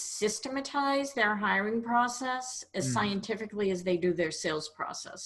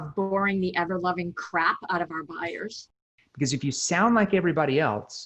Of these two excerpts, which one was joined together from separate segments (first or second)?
second